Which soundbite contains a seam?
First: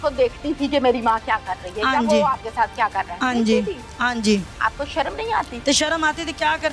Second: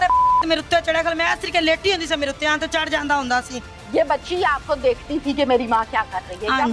first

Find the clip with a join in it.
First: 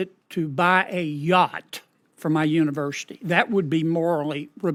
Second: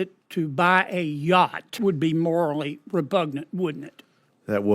second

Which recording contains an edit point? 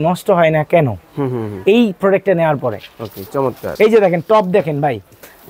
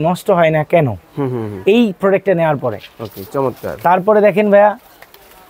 first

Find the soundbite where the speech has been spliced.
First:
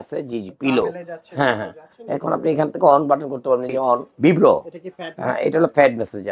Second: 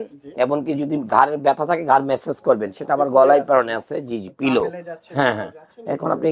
first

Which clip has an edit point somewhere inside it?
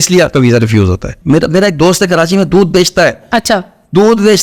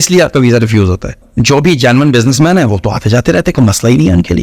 first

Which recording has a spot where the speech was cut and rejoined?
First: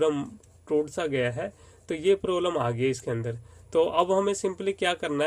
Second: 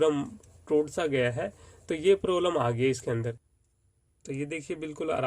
second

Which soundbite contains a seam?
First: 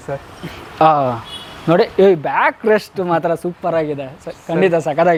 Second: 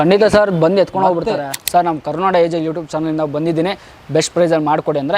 second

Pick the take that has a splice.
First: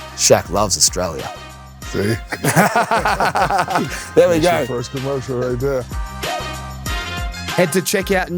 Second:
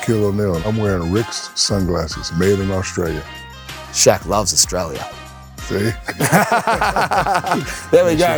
first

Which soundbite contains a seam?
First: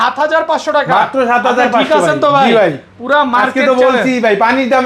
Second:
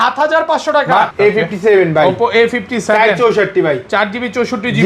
second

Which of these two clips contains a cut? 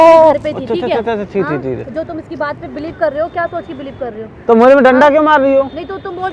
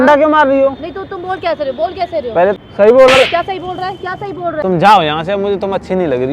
second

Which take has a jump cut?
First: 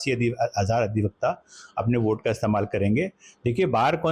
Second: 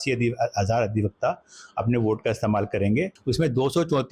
second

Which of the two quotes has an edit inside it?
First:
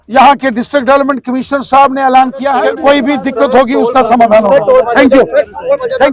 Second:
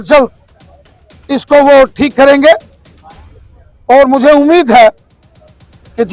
first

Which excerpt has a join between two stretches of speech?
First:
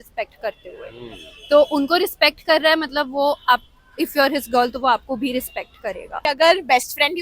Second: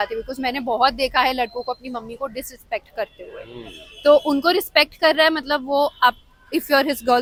first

